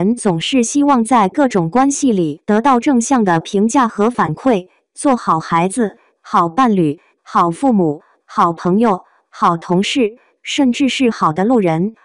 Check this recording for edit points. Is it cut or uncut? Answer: uncut